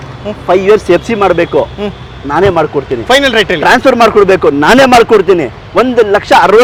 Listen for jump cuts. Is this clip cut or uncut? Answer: uncut